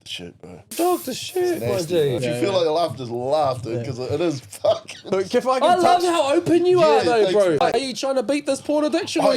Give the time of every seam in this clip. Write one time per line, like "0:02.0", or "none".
0:00.7
0:02.2
0:07.6